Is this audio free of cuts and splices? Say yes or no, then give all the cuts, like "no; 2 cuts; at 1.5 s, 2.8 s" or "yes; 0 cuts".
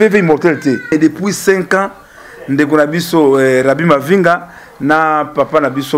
no; 1 cut; at 0.9 s